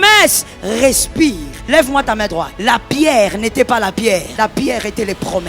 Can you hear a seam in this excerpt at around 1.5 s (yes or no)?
yes